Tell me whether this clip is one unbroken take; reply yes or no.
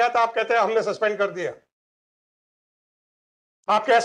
yes